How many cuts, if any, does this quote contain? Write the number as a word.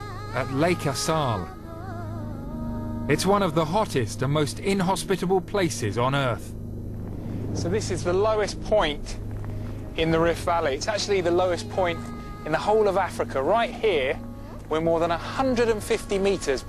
one